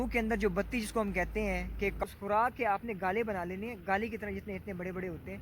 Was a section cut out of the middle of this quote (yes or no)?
yes